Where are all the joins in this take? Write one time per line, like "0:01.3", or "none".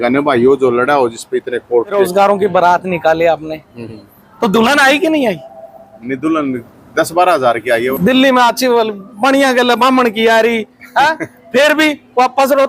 0:02.0
0:07.9